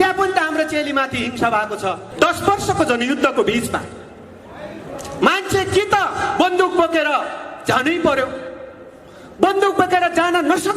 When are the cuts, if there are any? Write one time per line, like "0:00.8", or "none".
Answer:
0:02.1